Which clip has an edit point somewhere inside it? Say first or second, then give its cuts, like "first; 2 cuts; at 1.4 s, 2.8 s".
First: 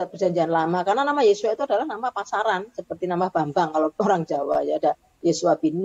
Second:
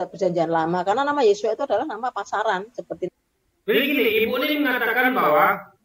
first; 1 cut; at 3.1 s